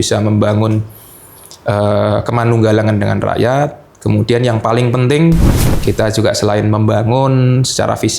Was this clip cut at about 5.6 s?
yes; 1 cut; at 5.6 s

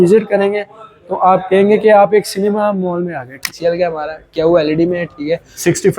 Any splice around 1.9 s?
no; 1 cut; at 3.5 s

